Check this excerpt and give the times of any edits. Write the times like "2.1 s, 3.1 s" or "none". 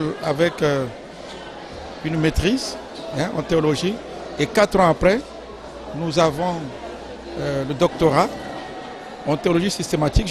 none